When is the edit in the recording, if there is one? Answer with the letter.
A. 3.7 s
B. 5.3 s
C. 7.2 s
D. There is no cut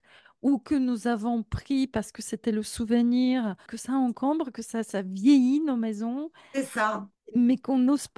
A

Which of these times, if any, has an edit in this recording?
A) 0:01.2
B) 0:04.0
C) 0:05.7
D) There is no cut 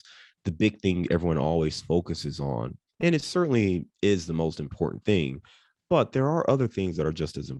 D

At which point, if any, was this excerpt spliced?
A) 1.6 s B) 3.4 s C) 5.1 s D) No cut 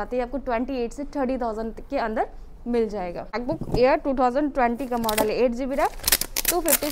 B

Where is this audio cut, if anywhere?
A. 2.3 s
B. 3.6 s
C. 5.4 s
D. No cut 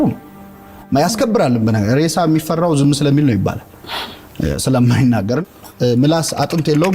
C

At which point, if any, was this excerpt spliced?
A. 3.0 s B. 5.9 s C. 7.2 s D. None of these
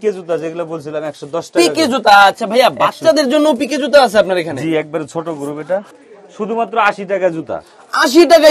B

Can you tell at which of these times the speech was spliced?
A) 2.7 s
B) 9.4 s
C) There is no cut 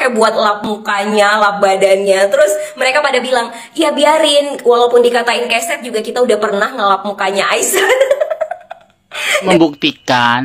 B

